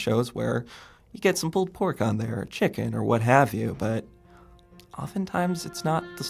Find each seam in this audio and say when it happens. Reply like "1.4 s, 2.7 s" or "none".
none